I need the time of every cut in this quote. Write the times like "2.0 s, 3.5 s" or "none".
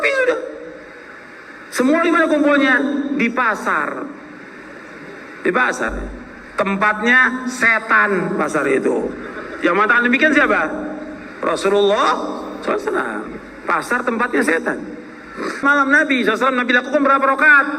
15.5 s